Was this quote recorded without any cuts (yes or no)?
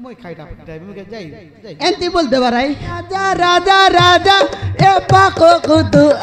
no